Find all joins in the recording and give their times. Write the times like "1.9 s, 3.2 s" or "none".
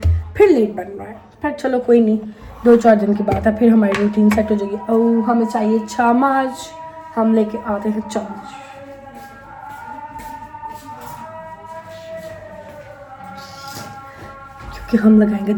none